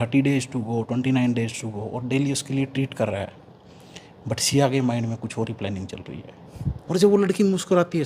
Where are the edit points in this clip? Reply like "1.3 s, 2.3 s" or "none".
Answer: 6.8 s